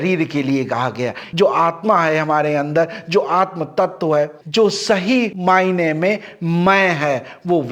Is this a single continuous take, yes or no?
no